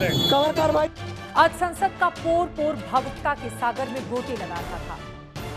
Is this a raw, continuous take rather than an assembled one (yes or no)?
no